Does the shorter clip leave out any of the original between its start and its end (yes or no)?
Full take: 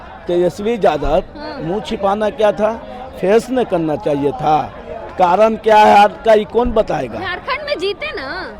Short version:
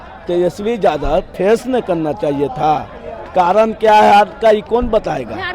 yes